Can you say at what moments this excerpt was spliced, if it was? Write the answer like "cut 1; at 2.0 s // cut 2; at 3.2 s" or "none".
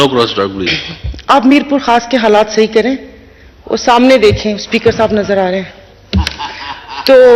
none